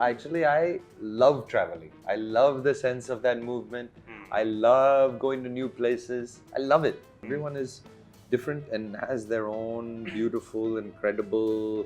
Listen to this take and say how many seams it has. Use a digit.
1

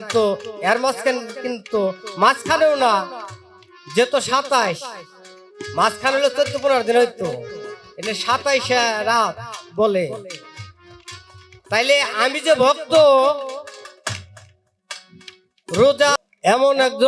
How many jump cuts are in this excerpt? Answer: 1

